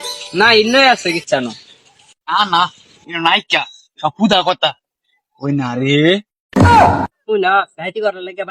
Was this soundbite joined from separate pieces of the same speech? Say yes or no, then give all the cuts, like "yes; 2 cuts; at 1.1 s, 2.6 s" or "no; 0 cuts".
yes; 1 cut; at 7.2 s